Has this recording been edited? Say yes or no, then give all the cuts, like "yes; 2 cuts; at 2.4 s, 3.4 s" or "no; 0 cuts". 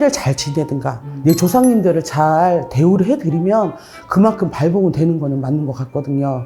no; 0 cuts